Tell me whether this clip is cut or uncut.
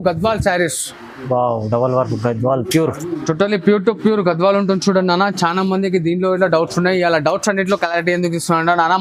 uncut